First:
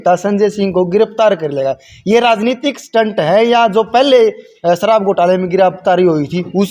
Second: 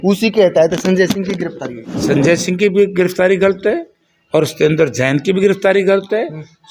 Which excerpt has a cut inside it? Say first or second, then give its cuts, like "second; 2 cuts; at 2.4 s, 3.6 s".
second; 1 cut; at 1.9 s